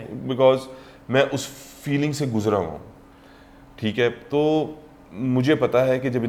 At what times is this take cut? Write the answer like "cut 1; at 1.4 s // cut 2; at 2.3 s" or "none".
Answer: none

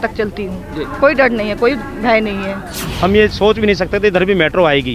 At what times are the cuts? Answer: cut 1; at 2.8 s

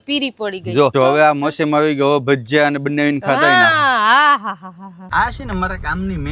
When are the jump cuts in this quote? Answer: cut 1; at 0.9 s // cut 2; at 5.0 s

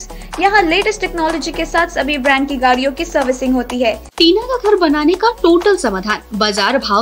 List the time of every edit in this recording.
cut 1; at 4.1 s

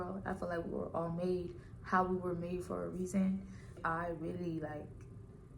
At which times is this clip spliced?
cut 1; at 3.8 s

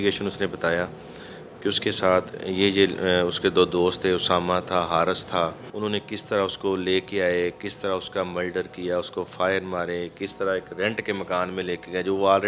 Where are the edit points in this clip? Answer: cut 1; at 5.6 s

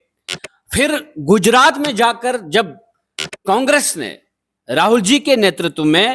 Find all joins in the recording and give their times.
none

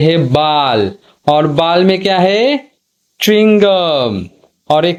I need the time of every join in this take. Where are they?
none

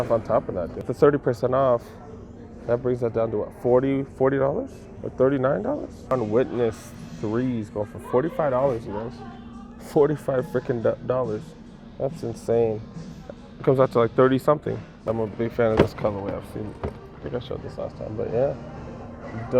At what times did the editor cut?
cut 1; at 0.9 s // cut 2; at 6.1 s // cut 3; at 15.1 s

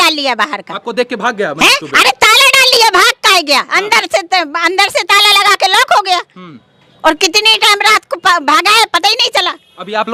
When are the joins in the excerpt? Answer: none

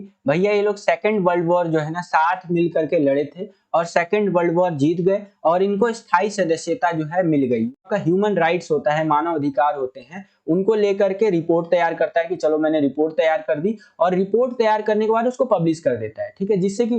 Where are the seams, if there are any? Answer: cut 1; at 7.8 s

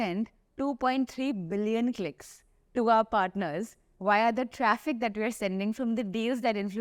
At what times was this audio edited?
none

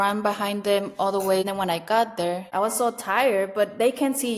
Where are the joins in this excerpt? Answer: cut 1; at 1.4 s

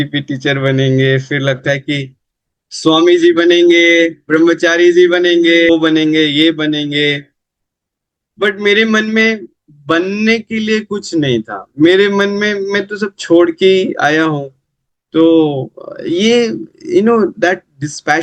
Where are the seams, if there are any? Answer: cut 1; at 5.7 s

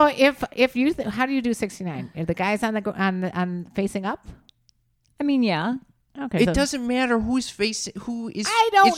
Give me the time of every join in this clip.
none

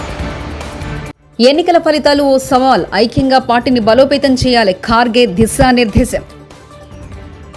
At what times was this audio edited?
cut 1; at 1.2 s

